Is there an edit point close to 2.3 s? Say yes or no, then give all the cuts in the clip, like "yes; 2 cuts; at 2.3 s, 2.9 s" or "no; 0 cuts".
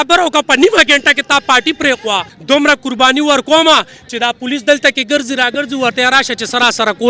yes; 1 cut; at 2.3 s